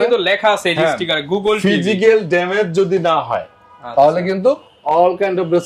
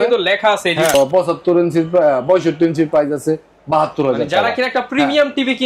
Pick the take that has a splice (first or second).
second